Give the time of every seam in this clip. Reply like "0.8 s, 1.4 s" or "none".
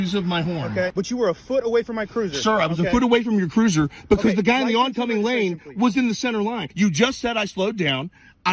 0.9 s, 6.6 s